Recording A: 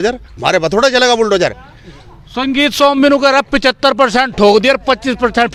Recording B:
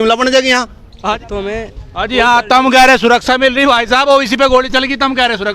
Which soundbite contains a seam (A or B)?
B